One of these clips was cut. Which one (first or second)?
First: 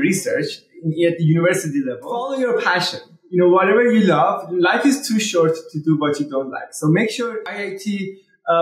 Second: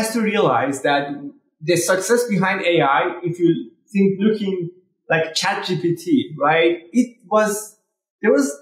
first